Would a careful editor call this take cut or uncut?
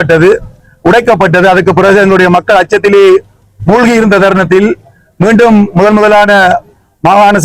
uncut